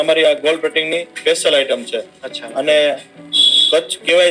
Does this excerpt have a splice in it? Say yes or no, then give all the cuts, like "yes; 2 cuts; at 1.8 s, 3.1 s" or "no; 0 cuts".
no; 0 cuts